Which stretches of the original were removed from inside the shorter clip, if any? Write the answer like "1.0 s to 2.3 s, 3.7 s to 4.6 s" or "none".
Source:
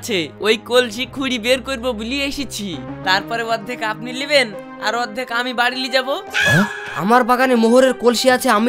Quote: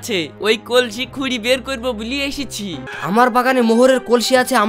2.9 s to 6.8 s

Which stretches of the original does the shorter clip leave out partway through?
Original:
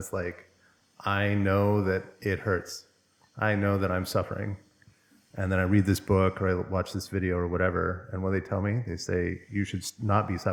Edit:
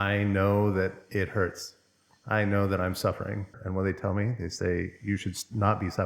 4.7 s to 8.1 s

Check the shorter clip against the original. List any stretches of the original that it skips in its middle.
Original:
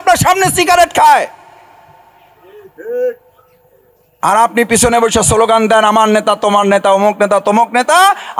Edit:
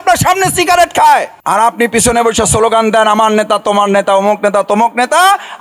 1.3 s to 4.1 s

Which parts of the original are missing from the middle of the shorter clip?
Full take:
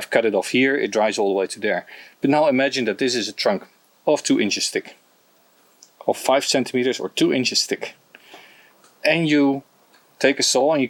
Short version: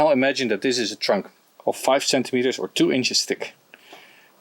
3.8 s to 5.8 s

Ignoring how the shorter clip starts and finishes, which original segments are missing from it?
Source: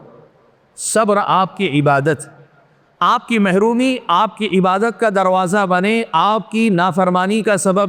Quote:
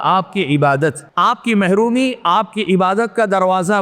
2.3 s to 2.9 s

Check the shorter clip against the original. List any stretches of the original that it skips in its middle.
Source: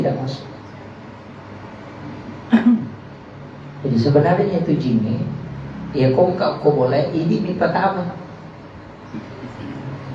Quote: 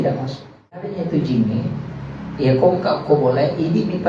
1.0 s to 4.5 s

